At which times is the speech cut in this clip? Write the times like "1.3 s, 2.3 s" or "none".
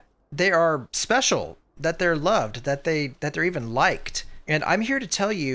0.9 s